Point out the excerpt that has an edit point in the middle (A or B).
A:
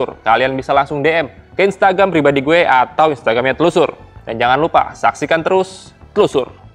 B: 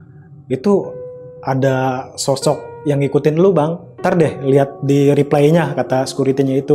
B